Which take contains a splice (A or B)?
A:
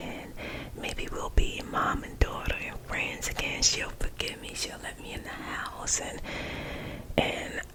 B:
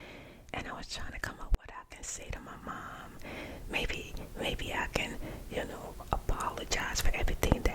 B